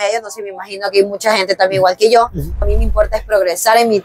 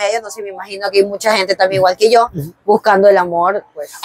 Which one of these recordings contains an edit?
first; 1 cut; at 2.6 s

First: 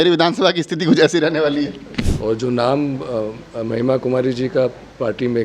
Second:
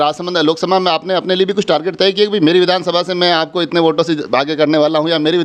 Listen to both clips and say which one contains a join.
first; 1 cut; at 1.9 s

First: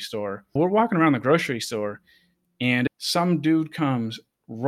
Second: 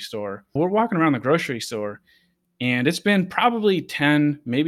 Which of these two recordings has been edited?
first; 1 cut; at 2.9 s

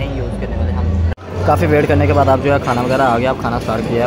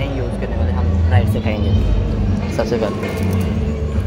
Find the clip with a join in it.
first; 1 cut; at 1.1 s

